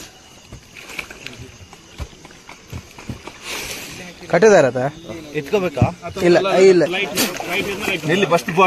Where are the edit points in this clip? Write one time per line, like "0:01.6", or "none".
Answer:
none